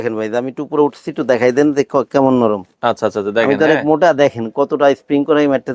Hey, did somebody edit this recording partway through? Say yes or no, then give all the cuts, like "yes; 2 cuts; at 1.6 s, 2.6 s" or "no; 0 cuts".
no; 0 cuts